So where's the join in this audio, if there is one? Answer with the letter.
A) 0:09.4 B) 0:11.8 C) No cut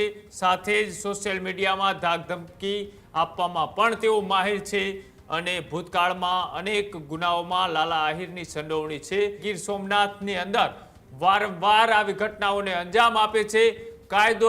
A